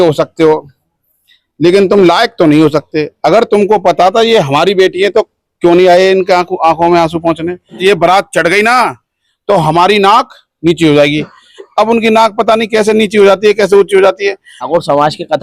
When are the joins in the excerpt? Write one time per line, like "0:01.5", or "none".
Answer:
0:07.8
0:14.5